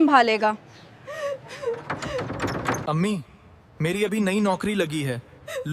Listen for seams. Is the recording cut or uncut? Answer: cut